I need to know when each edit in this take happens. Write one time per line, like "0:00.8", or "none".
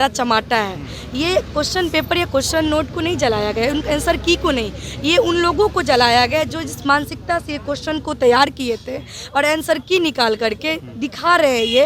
none